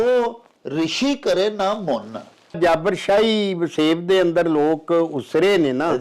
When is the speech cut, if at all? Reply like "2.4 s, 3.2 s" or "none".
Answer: 2.6 s